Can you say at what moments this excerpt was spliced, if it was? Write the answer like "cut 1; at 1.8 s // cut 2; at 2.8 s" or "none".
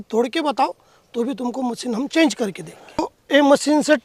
cut 1; at 3.0 s